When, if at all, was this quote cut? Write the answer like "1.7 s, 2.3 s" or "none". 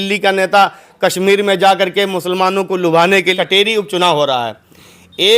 3.3 s